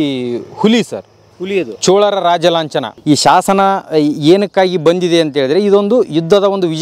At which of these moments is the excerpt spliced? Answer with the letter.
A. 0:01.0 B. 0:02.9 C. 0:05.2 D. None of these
B